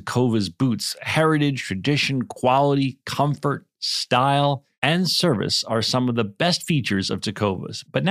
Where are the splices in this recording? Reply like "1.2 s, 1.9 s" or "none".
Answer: none